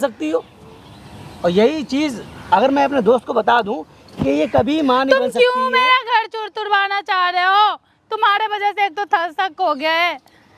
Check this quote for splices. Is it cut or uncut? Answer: uncut